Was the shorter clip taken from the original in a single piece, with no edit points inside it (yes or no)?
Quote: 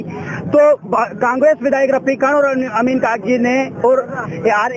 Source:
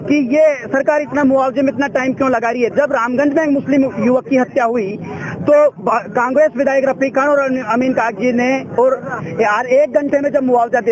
yes